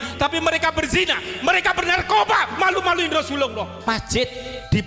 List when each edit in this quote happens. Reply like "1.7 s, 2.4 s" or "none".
3.8 s